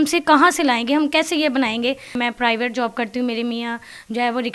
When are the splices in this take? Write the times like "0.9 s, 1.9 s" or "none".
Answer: 2.1 s